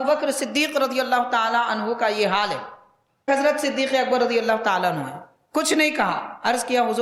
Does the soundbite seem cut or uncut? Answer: cut